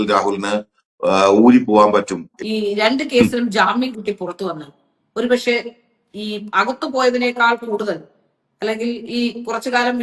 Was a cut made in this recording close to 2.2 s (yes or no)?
yes